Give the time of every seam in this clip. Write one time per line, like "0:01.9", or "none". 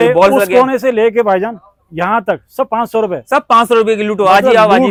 none